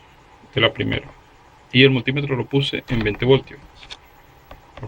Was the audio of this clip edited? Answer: no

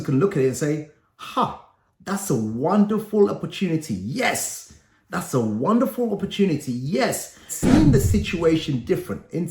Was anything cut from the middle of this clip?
yes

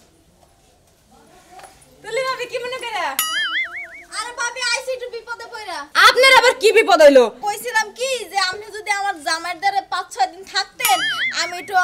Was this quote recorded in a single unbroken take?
no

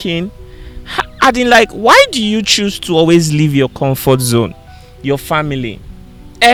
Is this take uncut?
yes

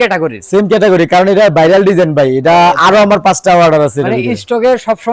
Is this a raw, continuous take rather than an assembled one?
yes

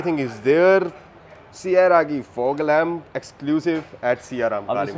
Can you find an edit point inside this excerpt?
no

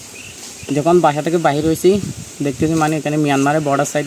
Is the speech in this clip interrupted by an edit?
no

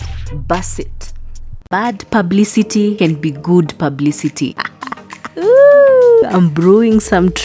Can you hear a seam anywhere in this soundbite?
yes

